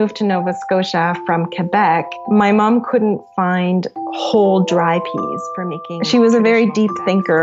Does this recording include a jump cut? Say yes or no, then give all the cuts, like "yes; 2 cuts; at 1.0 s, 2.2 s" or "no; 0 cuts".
yes; 1 cut; at 5.6 s